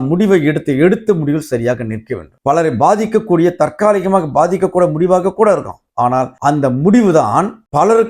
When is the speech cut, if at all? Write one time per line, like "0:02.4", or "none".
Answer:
0:02.2